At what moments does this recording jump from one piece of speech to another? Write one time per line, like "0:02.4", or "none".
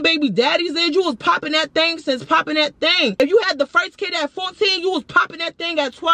0:03.2

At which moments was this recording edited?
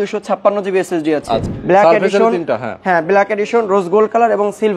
0:01.5

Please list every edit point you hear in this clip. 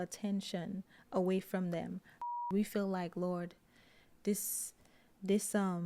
0:02.1

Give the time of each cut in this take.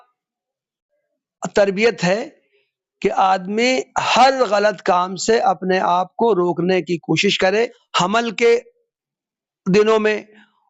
0:07.8

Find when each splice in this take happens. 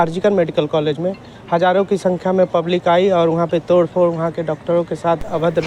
none

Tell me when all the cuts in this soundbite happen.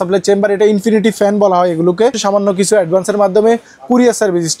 0:02.2

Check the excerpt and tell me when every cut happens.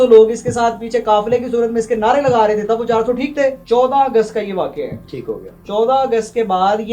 0:03.6
0:05.5

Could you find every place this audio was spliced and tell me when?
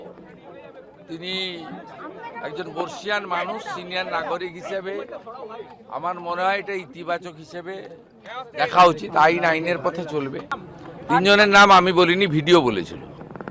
0:10.6

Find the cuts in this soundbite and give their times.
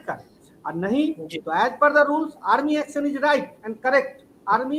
none

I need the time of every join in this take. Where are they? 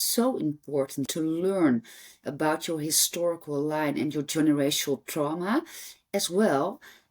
0:01.1

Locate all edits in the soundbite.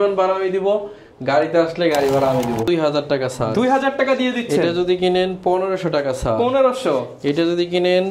0:02.7

